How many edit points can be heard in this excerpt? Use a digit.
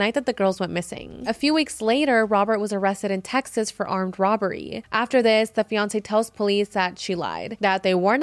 1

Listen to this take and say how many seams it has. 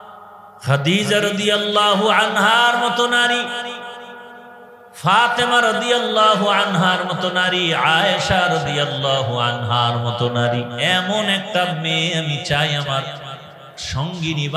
1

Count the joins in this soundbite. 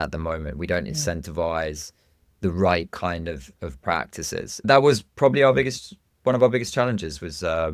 1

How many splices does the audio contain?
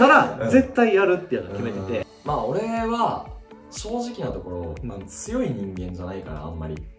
1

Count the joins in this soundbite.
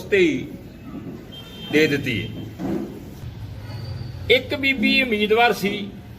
1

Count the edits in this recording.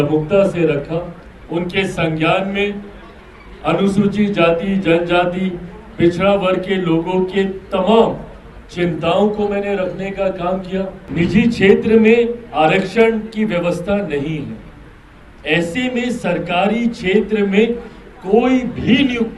1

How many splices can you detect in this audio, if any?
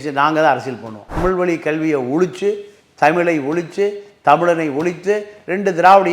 1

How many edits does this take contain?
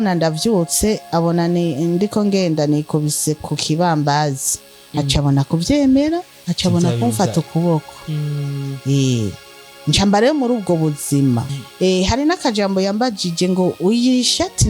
2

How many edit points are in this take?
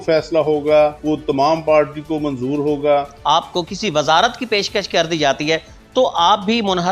2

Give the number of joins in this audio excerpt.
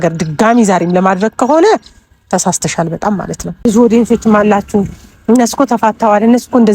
1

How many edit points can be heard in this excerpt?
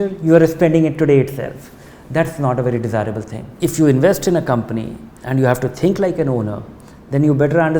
1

